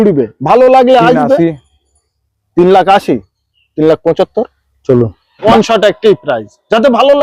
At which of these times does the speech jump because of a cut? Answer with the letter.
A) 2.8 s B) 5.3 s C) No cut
B